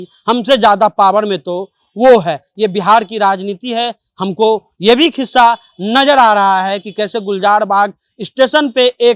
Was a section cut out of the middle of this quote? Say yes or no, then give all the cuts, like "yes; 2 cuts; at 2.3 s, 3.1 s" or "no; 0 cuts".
no; 0 cuts